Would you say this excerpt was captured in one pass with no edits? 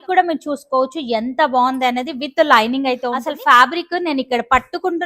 no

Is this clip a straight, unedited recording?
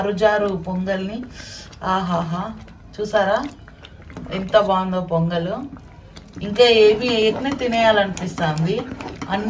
yes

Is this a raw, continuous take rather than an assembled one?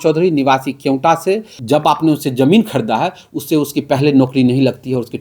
no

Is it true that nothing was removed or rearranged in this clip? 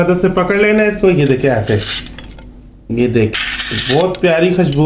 no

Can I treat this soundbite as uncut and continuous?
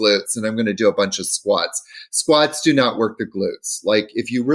yes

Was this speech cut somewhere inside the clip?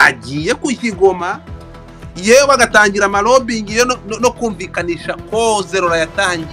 no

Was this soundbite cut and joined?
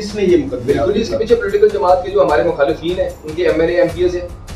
no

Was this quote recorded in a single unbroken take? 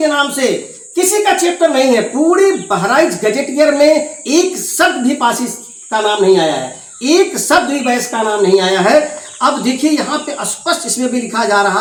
yes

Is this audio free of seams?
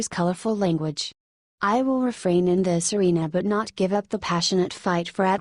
no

